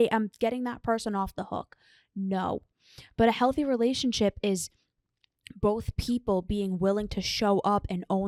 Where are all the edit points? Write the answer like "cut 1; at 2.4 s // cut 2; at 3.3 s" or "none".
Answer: none